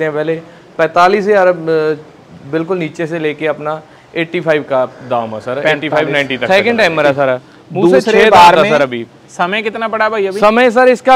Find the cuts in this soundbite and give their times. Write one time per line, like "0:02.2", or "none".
0:06.4